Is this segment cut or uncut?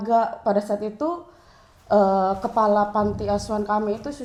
uncut